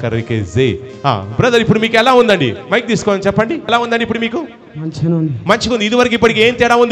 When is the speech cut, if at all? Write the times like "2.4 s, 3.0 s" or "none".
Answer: 3.7 s